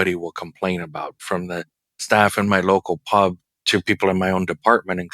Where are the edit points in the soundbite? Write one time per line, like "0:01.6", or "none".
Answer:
0:03.4